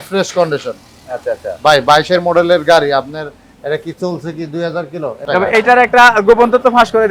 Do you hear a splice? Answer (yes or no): yes